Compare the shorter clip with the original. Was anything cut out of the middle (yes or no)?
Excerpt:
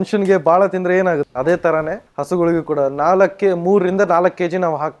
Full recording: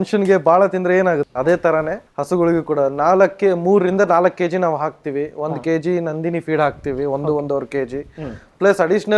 no